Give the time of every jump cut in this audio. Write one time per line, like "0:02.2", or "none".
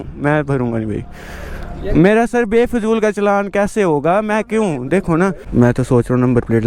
0:05.4